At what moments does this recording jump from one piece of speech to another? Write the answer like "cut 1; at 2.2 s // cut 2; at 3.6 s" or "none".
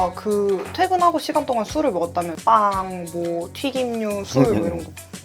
cut 1; at 2.3 s

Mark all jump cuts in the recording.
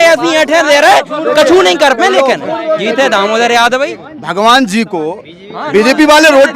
cut 1; at 4.0 s

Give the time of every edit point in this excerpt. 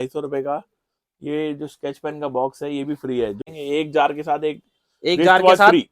cut 1; at 3.4 s

